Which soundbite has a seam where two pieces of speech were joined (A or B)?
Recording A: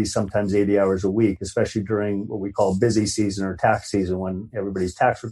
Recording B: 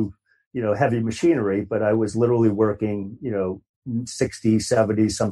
B